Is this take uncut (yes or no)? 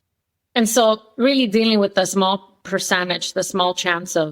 yes